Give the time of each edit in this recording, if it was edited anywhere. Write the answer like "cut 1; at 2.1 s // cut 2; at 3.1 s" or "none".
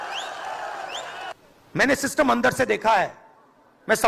cut 1; at 1.4 s